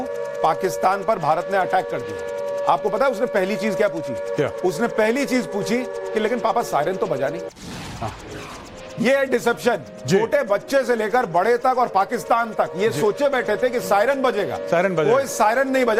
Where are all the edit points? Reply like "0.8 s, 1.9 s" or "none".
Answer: none